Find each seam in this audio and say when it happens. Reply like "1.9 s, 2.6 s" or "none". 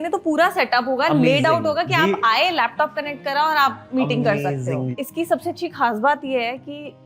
5.0 s